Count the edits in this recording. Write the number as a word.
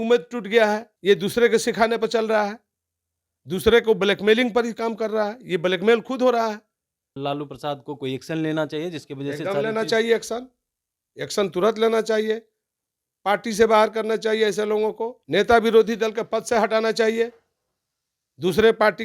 three